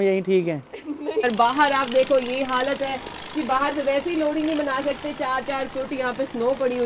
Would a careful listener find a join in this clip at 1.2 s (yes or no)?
yes